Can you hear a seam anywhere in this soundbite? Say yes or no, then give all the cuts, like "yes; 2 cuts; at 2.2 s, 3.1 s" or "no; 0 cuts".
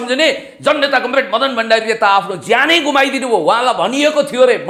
no; 0 cuts